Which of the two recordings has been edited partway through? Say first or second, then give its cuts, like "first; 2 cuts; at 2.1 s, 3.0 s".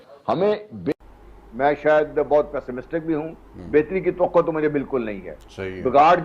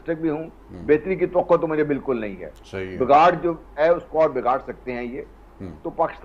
first; 1 cut; at 0.9 s